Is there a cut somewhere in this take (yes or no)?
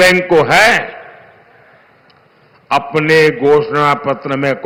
no